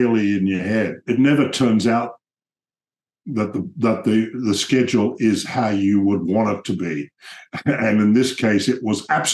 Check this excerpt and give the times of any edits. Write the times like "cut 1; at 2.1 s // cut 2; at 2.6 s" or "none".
cut 1; at 1.0 s